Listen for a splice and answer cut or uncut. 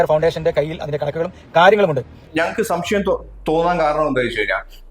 cut